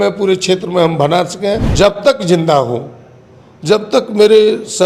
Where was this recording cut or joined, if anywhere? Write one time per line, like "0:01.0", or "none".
0:01.7